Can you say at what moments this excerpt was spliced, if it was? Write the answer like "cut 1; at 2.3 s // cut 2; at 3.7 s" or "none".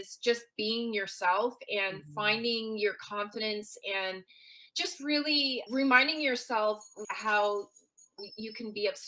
cut 1; at 7.0 s